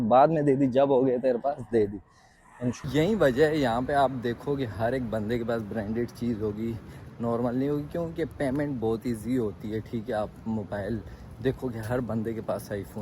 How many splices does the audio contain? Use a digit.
1